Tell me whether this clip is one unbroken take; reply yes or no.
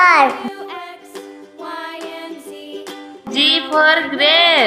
no